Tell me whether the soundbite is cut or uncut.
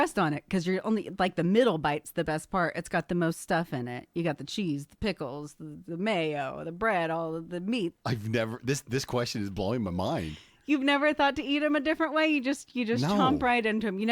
cut